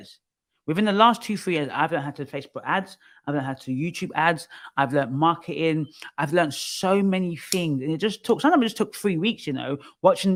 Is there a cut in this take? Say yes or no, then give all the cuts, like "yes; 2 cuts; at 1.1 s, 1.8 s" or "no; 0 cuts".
no; 0 cuts